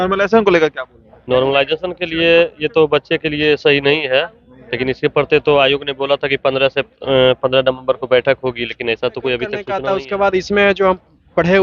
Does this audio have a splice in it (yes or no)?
yes